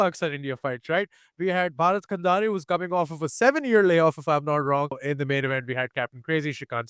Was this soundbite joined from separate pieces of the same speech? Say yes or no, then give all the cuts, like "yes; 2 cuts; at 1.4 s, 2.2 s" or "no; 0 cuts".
yes; 1 cut; at 5.0 s